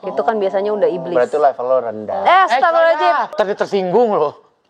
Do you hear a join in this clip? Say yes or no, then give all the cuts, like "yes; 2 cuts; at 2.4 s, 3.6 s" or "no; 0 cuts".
yes; 1 cut; at 3.3 s